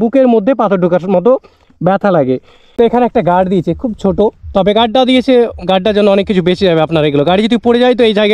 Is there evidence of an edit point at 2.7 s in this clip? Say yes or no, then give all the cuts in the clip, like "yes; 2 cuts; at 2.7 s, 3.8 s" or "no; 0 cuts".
yes; 1 cut; at 2.7 s